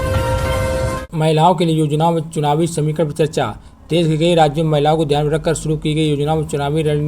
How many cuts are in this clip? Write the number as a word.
one